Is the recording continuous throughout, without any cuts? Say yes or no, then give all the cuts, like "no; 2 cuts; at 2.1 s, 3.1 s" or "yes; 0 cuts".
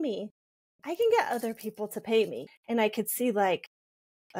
no; 1 cut; at 2.4 s